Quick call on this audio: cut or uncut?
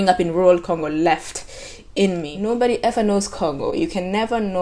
cut